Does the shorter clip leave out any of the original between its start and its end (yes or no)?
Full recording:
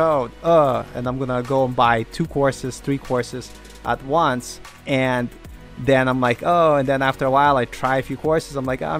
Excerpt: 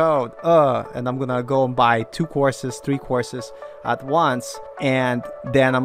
yes